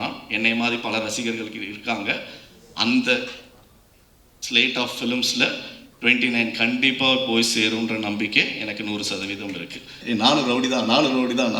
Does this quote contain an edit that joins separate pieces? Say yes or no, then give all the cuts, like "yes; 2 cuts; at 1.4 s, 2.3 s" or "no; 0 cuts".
yes; 1 cut; at 10.0 s